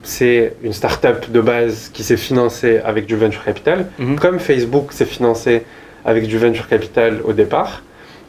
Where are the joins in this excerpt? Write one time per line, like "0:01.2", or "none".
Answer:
none